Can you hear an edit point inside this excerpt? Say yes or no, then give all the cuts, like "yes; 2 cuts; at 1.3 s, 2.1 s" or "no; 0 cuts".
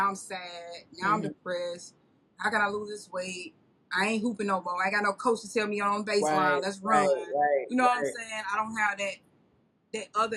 no; 0 cuts